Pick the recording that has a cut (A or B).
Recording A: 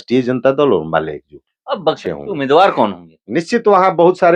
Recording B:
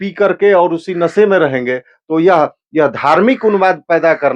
A